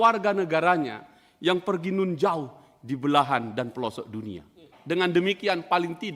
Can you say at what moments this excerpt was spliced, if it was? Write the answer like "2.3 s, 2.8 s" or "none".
4.7 s